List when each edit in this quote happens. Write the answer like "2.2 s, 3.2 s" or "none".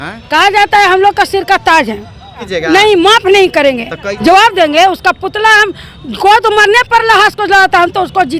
2.5 s, 4.0 s